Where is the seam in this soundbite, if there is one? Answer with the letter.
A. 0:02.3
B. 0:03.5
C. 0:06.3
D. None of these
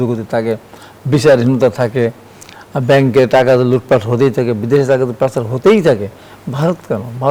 D